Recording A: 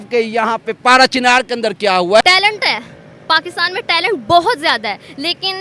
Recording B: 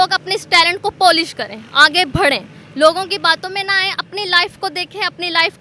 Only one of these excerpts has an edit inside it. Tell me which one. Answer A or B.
A